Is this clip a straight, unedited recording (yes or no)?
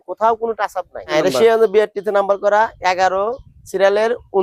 no